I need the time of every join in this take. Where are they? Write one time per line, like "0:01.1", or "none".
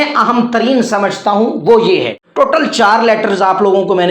0:02.2

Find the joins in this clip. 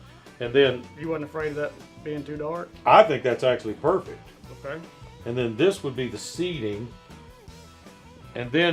none

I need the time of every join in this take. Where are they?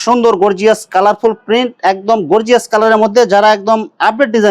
none

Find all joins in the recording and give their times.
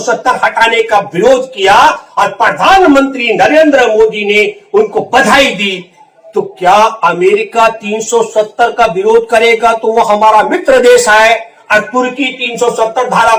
none

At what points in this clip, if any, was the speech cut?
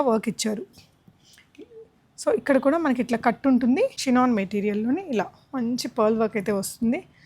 0:04.0

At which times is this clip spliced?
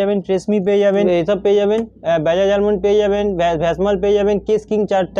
0:01.1

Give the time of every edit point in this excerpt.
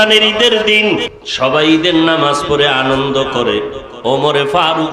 0:01.2

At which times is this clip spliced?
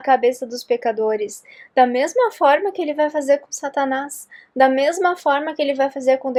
none

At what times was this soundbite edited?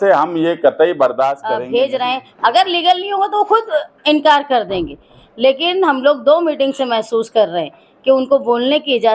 0:01.5

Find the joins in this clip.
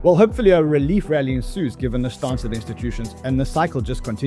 none

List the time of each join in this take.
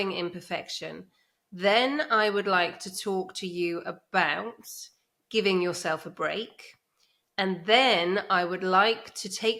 none

